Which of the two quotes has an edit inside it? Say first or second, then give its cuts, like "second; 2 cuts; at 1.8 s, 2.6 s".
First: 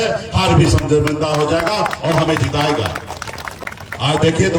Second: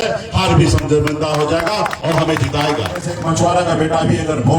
second; 1 cut; at 3.1 s